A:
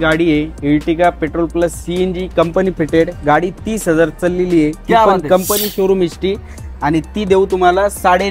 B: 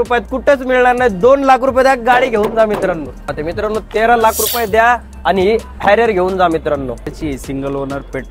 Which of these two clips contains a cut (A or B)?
B